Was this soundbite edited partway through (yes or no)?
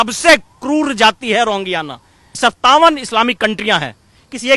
yes